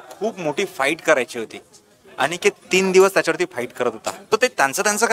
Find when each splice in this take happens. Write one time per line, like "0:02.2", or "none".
0:04.1